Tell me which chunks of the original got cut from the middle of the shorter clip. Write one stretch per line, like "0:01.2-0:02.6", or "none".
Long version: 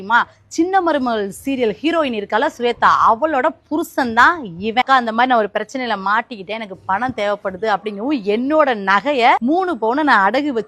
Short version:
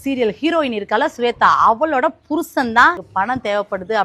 0:04.4-0:06.8